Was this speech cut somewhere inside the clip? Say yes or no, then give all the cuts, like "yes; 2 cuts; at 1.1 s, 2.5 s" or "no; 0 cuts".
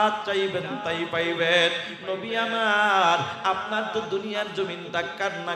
no; 0 cuts